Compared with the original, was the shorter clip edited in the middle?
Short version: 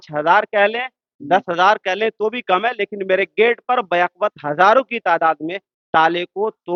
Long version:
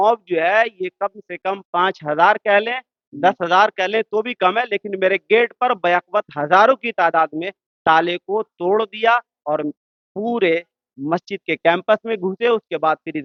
no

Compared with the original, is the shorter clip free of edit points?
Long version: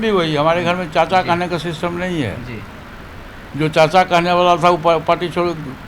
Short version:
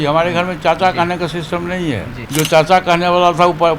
no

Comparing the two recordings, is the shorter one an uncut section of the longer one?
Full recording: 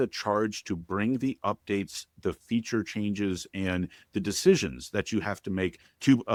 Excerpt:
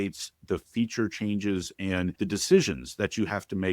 no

